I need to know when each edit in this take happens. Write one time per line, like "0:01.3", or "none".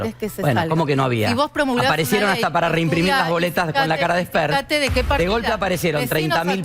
none